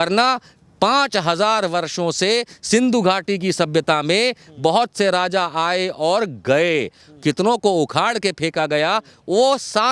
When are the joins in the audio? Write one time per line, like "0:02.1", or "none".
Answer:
none